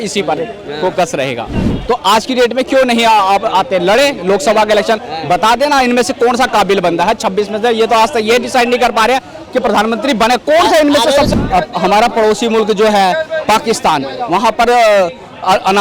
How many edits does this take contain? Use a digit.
2